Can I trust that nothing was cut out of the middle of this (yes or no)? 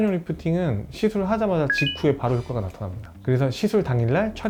yes